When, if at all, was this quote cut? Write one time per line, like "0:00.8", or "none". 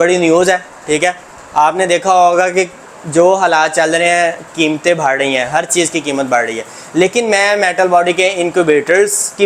none